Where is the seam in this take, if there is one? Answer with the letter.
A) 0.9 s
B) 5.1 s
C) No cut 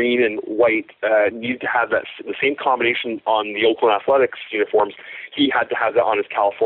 C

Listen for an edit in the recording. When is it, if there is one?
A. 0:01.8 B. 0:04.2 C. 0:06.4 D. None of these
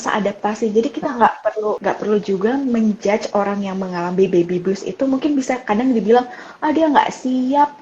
A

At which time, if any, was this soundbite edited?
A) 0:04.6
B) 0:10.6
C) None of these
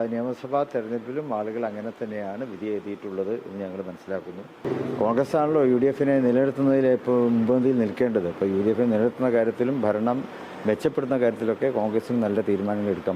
A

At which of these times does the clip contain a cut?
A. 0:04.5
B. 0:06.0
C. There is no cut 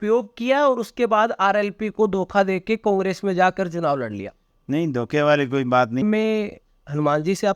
B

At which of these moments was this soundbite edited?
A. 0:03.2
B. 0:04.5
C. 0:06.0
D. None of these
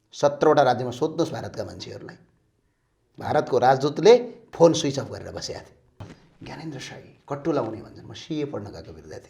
C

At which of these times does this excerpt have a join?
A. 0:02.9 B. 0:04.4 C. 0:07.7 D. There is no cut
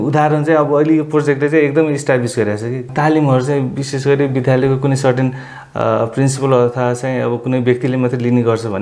A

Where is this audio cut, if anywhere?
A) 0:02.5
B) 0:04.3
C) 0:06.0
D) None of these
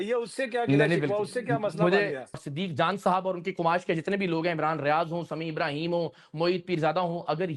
A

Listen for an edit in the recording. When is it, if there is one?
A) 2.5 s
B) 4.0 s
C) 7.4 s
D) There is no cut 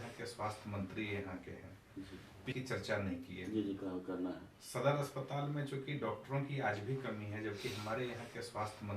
A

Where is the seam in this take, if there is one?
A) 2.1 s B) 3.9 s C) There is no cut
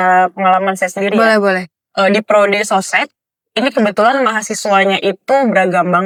C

